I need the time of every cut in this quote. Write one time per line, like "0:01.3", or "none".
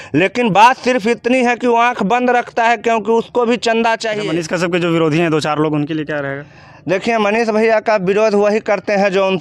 0:04.1